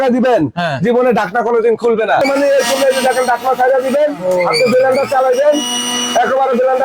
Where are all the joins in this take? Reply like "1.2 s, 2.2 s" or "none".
2.2 s